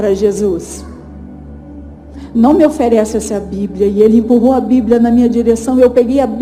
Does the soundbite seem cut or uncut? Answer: uncut